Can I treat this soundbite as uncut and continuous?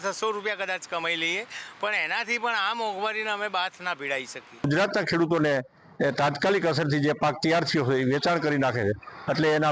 no; 1 cut; at 4.7 s

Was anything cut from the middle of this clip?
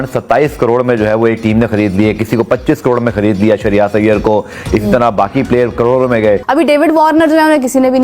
yes; 1 cut; at 6.4 s

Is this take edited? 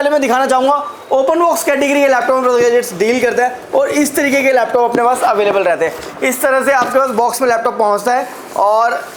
no; 0 cuts

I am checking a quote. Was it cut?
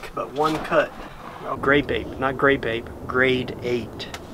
yes; 1 cut; at 1.5 s

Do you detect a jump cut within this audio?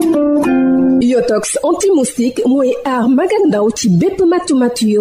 yes; 1 cut; at 0.9 s

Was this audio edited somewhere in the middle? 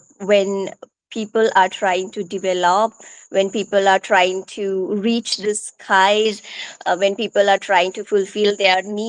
no; 0 cuts

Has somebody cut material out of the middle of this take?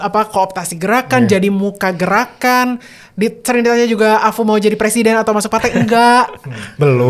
no; 0 cuts

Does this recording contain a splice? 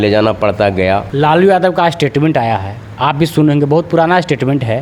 yes; 1 cut; at 1.1 s

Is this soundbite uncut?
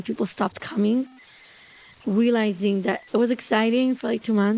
yes; 0 cuts

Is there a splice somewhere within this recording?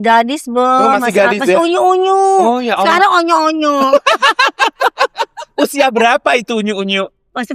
no; 0 cuts

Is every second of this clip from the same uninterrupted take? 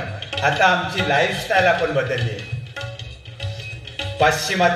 yes; 0 cuts

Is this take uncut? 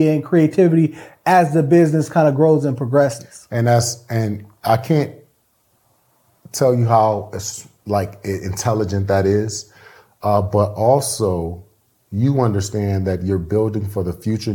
yes; 0 cuts

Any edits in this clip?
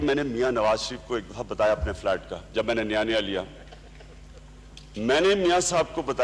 no; 0 cuts

